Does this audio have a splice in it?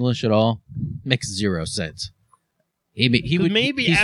no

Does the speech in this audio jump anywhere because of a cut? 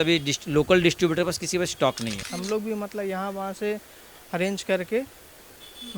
yes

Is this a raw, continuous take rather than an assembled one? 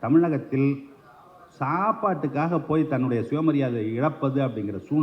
yes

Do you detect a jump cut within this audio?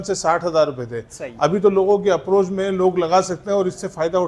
no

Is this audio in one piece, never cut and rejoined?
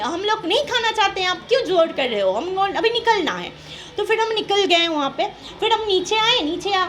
no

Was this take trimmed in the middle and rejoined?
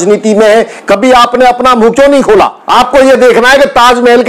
yes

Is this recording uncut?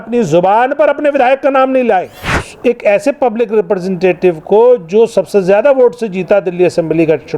no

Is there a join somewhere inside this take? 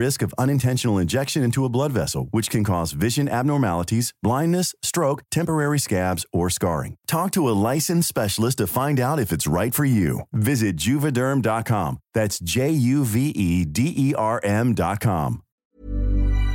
yes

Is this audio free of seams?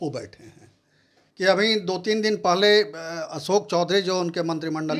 yes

